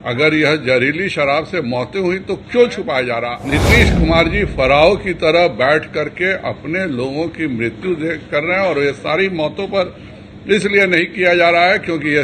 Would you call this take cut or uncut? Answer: cut